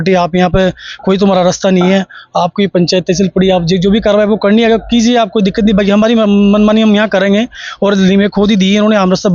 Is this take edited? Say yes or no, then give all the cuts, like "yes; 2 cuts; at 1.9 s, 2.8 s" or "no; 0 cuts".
no; 0 cuts